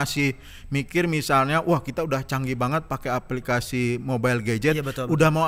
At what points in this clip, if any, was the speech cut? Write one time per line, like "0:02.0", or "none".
none